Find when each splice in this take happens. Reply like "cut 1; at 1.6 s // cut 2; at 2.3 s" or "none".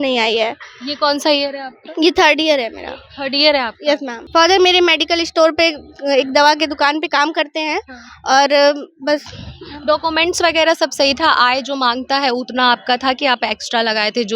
cut 1; at 4.1 s